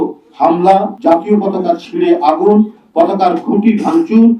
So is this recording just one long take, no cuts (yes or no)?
no